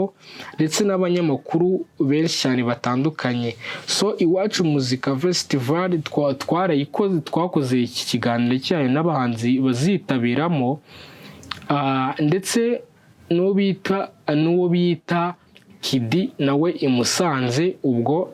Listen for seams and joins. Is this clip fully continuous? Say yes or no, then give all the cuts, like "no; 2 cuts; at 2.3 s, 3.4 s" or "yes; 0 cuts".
yes; 0 cuts